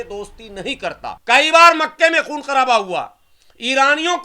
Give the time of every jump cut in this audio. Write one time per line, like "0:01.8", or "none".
0:01.1